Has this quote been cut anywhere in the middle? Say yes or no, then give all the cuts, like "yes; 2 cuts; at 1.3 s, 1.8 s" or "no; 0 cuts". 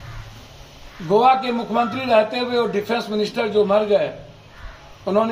no; 0 cuts